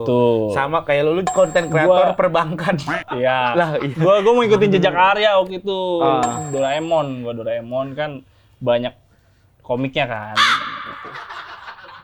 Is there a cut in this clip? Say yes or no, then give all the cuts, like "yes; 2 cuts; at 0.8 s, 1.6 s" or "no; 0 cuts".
no; 0 cuts